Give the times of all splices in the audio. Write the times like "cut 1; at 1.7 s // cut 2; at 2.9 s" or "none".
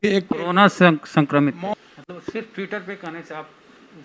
cut 1; at 1.6 s